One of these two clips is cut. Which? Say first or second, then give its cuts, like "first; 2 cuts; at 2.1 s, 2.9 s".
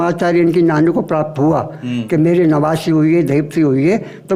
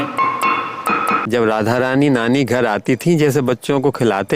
second; 1 cut; at 1.2 s